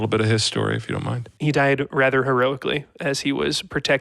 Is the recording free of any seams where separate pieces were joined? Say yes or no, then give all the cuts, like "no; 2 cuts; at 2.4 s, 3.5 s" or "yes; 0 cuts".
no; 1 cut; at 1.2 s